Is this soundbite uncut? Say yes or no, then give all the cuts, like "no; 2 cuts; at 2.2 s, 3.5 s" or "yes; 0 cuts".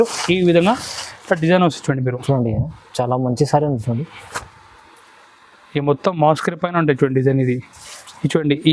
yes; 0 cuts